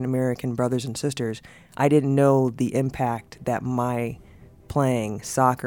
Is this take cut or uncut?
uncut